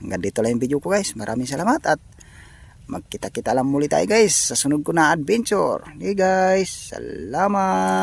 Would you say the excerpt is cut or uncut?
uncut